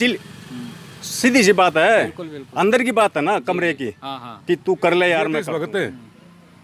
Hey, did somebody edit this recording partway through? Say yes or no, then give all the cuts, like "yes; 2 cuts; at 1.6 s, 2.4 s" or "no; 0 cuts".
yes; 1 cut; at 5.3 s